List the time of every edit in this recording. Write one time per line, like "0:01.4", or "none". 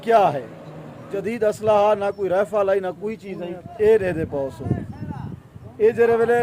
0:01.1
0:03.5